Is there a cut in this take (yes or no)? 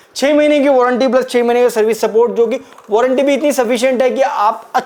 no